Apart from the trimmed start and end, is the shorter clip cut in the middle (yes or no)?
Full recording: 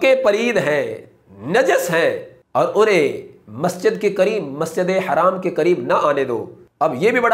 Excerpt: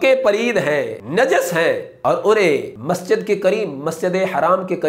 yes